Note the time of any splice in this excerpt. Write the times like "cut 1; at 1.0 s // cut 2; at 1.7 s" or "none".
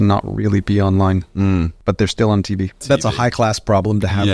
cut 1; at 1.7 s // cut 2; at 2.8 s